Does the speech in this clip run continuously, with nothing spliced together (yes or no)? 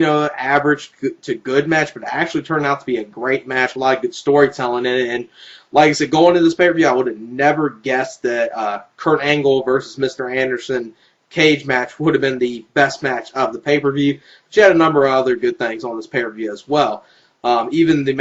no